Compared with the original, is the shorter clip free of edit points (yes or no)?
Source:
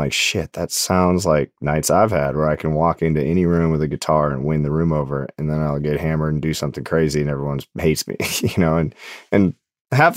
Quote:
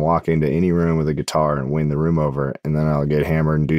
yes